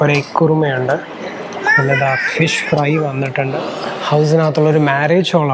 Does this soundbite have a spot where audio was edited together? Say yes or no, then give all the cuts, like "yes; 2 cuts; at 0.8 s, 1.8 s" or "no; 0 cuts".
yes; 1 cut; at 3.5 s